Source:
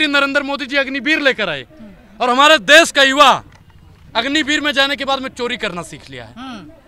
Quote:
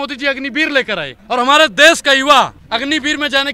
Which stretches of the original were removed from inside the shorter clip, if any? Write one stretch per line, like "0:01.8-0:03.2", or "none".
0:01.6-0:02.0
0:03.5-0:04.0